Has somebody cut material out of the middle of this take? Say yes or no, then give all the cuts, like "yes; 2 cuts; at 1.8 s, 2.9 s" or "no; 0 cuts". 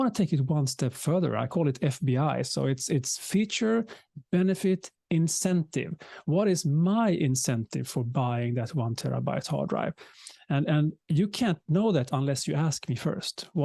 no; 0 cuts